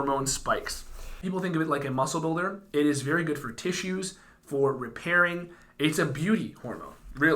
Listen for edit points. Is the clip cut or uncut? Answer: cut